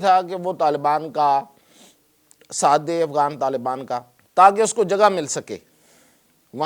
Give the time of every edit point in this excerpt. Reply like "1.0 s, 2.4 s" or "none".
4.2 s